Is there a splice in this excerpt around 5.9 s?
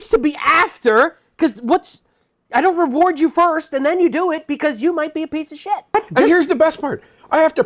yes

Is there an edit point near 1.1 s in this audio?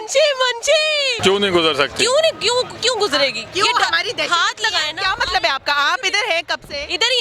yes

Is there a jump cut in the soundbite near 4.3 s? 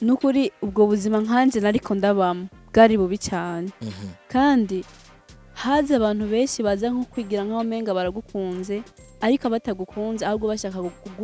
no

